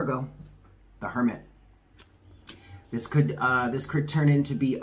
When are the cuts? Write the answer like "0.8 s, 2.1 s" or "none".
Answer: none